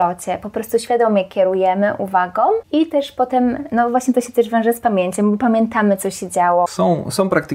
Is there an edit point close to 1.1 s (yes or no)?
no